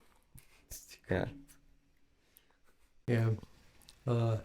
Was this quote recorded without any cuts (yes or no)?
no